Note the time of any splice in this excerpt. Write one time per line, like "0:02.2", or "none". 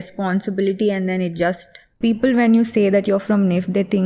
0:01.9